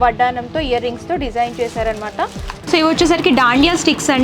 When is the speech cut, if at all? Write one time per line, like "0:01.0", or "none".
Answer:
0:02.5